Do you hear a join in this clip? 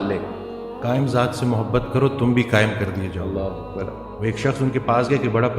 yes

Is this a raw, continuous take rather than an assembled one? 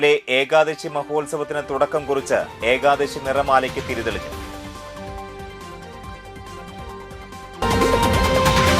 no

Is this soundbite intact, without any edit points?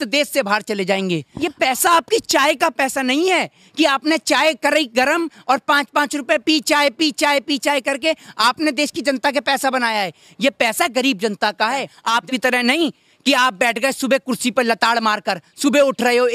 no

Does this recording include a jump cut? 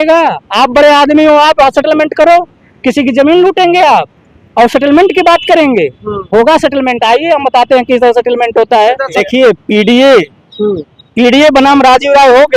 yes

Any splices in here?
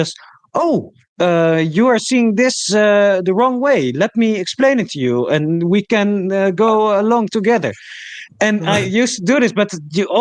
no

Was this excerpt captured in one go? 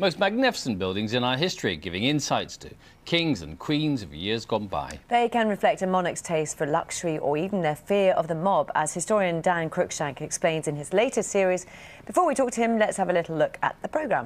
no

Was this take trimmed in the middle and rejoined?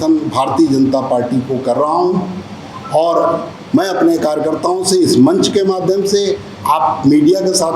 no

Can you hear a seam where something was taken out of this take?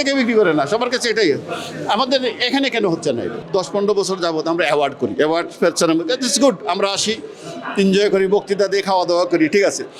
yes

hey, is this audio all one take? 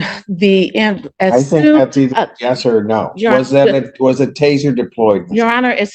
yes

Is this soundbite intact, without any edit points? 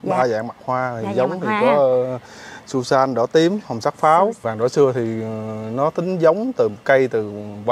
no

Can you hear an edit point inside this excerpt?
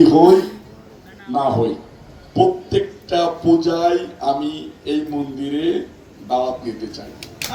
no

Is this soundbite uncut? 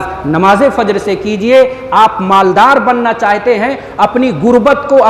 yes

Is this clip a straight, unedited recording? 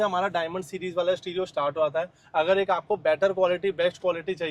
yes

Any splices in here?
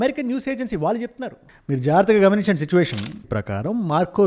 yes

